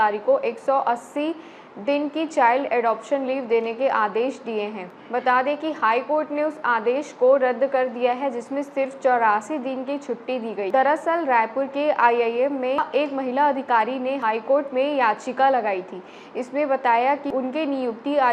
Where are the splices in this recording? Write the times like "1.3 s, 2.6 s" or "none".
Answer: none